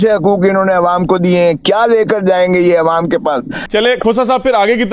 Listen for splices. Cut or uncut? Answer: cut